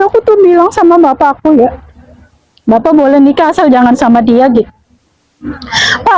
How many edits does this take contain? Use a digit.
0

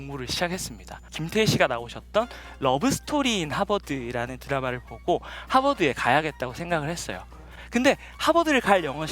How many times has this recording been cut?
1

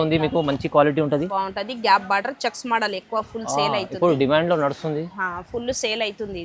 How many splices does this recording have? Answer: 1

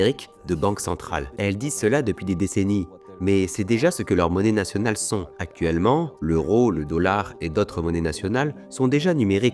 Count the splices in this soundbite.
2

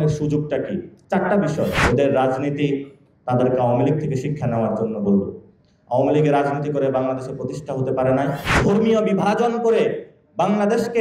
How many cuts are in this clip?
3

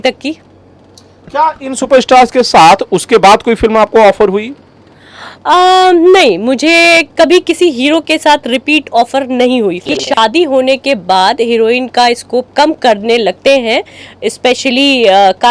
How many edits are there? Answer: 1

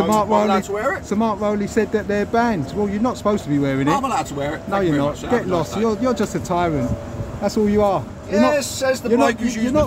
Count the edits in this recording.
0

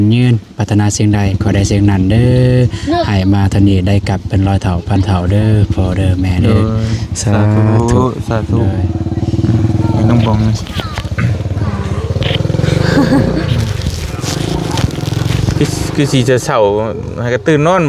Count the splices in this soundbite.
0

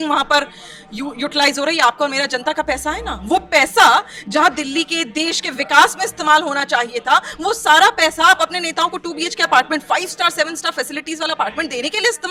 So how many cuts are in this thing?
0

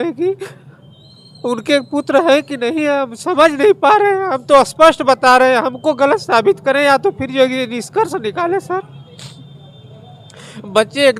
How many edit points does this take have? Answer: 0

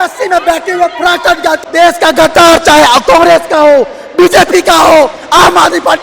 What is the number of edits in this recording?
1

